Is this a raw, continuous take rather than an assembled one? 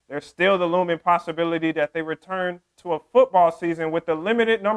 yes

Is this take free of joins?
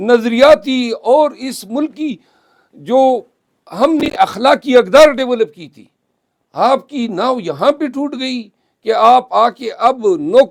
yes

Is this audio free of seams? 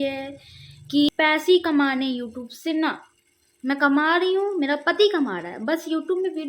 no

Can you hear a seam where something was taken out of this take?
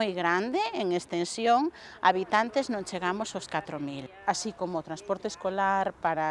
yes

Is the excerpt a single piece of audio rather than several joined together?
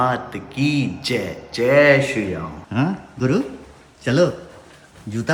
yes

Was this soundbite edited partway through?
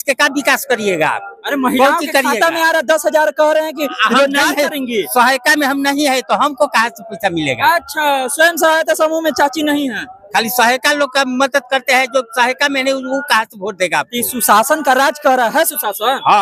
no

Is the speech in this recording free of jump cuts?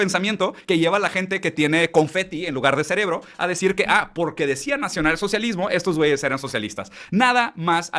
yes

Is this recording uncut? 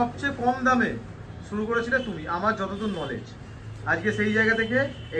yes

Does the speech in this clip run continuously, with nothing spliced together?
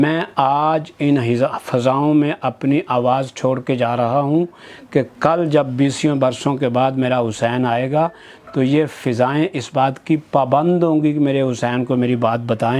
yes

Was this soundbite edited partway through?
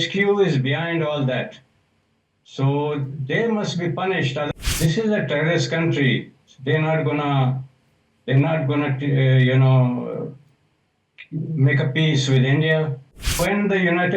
yes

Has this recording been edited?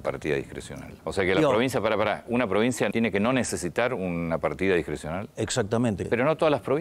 yes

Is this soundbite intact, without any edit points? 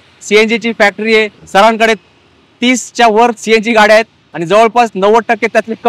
no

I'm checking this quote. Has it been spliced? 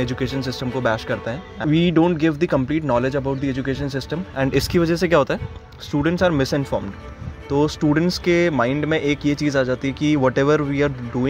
yes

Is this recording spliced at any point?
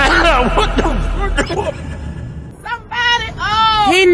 no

